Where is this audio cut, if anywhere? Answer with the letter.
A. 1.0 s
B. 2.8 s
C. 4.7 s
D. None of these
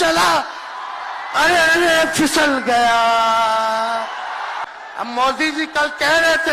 C